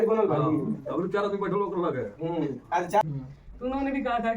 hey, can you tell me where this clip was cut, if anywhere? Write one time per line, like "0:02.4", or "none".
0:03.0